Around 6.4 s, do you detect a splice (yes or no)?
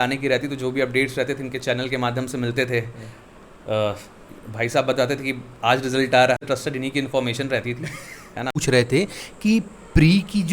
yes